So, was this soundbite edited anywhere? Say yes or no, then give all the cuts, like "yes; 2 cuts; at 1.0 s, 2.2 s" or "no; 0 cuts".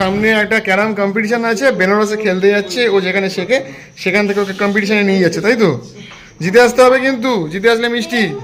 no; 0 cuts